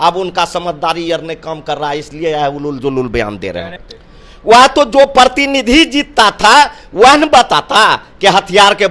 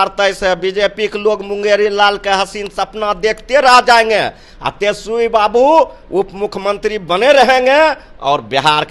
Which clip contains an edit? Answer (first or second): first